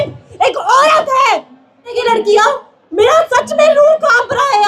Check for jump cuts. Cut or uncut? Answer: cut